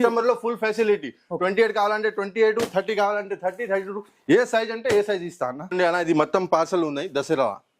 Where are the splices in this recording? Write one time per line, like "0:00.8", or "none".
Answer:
0:05.7

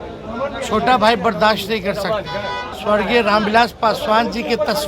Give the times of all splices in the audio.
0:02.7

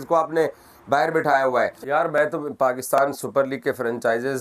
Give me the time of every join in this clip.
0:01.8

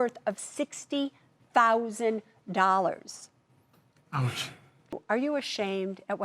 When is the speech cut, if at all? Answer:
0:05.0

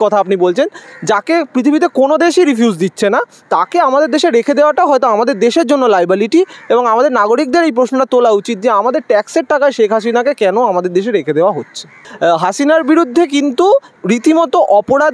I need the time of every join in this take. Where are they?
0:12.0

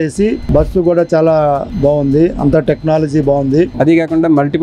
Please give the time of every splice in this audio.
0:03.7

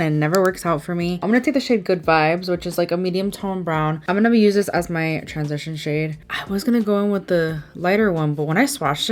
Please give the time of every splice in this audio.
none

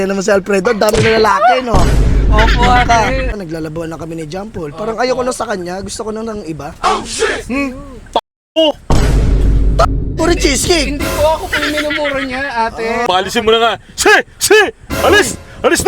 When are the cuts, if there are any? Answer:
0:03.4
0:13.0

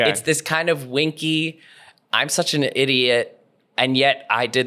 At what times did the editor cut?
none

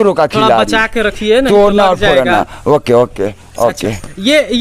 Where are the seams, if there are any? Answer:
none

